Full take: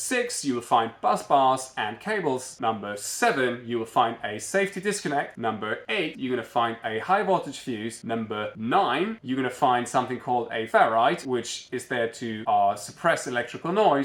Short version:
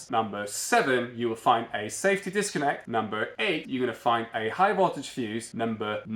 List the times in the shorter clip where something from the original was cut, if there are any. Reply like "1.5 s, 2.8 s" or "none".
none